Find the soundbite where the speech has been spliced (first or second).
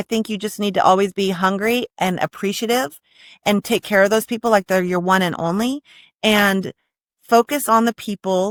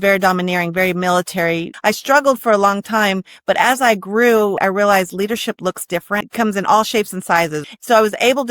second